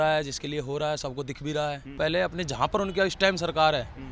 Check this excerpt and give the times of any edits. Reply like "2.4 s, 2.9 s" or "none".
2.0 s

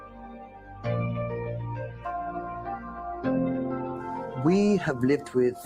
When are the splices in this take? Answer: 3.9 s

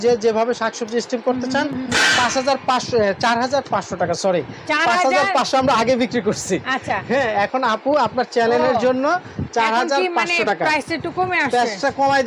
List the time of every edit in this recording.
none

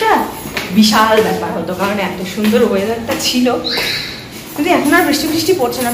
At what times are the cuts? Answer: none

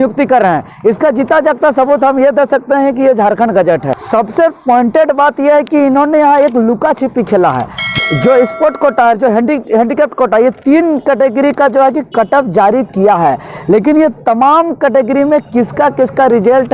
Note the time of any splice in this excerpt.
4.0 s, 7.9 s

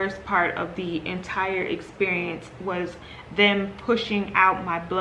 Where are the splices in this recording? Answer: none

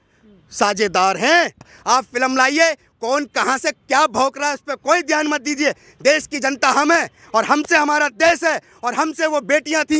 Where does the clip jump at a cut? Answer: 1.7 s

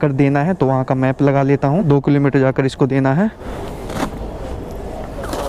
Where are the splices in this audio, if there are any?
none

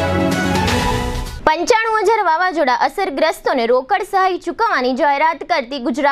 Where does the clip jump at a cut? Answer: 1.2 s

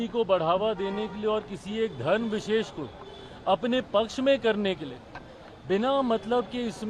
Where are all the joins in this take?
none

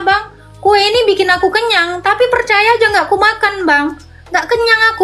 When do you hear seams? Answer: none

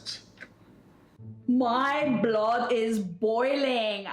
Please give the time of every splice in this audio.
1.5 s

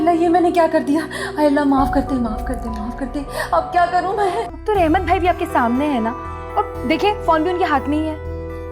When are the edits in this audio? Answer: 4.5 s

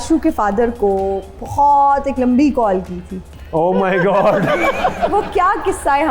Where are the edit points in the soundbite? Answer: 5.1 s

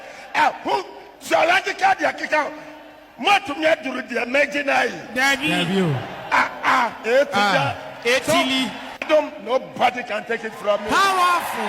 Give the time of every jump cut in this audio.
9.0 s

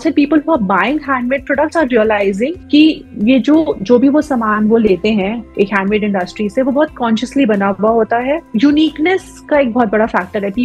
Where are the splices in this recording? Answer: 8.4 s

